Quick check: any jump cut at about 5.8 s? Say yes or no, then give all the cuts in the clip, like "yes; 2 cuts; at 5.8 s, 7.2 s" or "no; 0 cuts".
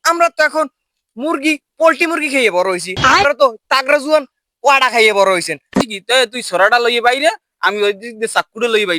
yes; 1 cut; at 5.8 s